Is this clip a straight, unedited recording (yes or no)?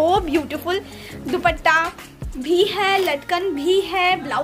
yes